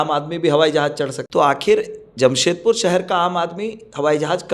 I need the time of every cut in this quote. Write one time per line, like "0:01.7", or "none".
0:01.2